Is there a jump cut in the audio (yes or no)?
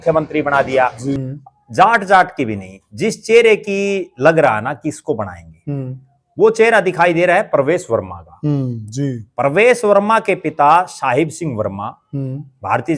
yes